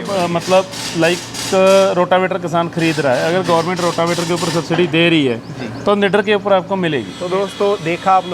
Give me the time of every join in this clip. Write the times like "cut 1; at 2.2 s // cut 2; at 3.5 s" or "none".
cut 1; at 7.1 s